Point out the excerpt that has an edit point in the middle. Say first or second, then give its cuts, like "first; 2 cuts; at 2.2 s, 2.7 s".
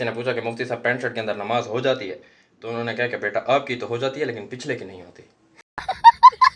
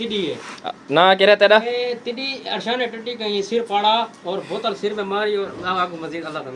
first; 1 cut; at 5.6 s